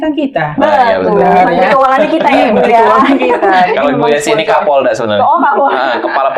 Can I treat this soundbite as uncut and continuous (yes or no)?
yes